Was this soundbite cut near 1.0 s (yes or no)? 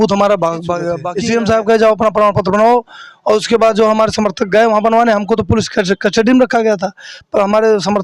yes